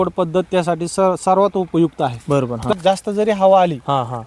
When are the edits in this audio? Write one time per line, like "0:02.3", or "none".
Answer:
0:02.7